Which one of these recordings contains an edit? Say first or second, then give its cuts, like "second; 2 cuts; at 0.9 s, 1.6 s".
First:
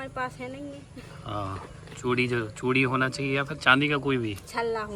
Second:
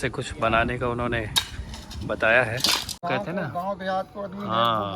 second; 1 cut; at 2.9 s